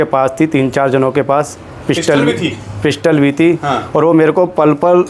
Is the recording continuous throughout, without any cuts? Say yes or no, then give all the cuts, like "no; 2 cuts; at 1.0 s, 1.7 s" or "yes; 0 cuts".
yes; 0 cuts